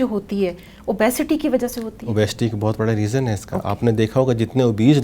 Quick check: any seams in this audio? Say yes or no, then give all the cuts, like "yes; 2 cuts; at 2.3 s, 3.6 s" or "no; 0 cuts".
no; 0 cuts